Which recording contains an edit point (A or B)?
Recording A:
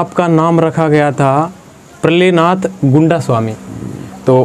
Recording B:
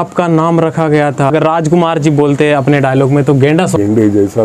B